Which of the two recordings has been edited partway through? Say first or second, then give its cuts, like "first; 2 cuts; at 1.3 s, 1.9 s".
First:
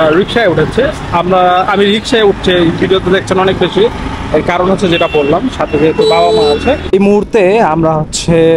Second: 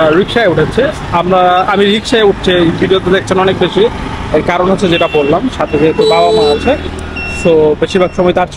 first; 1 cut; at 6.8 s